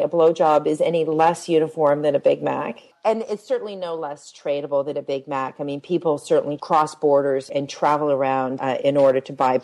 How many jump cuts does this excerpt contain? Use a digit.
4